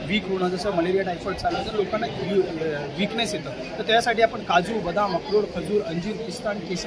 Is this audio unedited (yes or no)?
yes